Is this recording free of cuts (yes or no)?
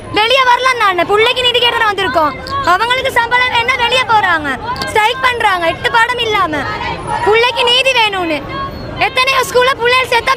yes